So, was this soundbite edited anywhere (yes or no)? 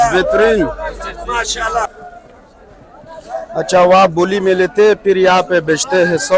yes